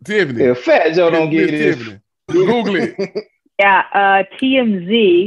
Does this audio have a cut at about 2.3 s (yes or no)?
yes